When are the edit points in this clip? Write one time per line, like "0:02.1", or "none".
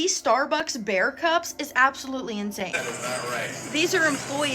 0:02.8